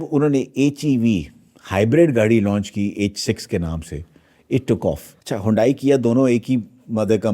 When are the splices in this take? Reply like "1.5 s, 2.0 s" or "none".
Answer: 5.1 s